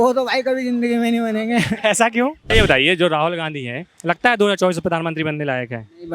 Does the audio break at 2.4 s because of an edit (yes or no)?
yes